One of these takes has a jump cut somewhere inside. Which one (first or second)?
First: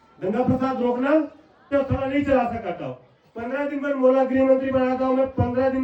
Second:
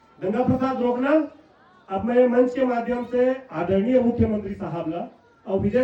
first